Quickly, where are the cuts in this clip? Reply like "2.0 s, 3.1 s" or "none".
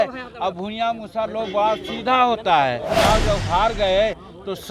2.9 s